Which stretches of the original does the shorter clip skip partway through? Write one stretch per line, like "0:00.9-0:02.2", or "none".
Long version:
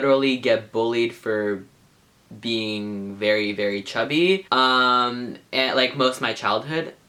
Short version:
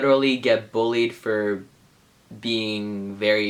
none